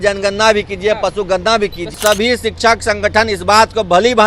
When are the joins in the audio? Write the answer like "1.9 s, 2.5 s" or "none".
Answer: 2.0 s